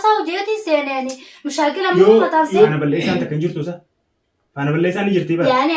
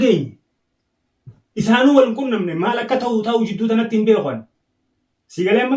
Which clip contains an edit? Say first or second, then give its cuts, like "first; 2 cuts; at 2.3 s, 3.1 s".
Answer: first; 1 cut; at 2.7 s